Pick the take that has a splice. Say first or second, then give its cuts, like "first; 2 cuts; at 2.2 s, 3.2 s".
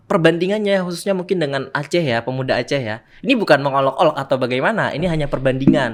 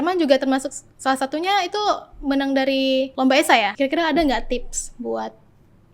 second; 2 cuts; at 3.1 s, 3.7 s